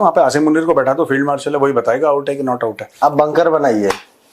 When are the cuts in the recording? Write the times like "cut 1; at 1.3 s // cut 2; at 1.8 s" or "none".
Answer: cut 1; at 2.8 s